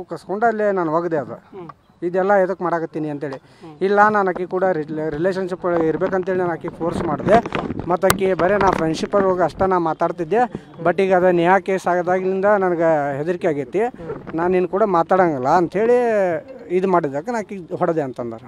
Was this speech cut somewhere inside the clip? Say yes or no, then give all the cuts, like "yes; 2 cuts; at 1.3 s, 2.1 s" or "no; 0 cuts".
yes; 1 cut; at 13.9 s